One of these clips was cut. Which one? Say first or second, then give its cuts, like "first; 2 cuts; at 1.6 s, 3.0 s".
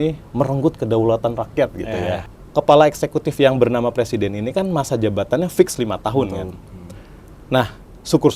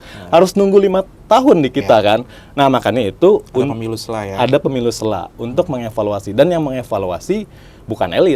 first; 1 cut; at 2.2 s